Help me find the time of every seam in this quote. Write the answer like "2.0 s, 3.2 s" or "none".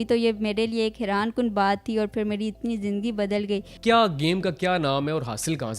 3.7 s